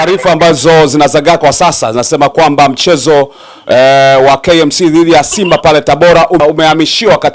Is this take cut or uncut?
cut